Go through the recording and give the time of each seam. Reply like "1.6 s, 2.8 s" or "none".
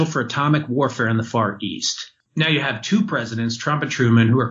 2.2 s